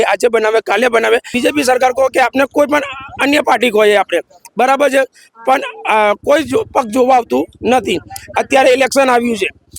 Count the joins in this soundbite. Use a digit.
1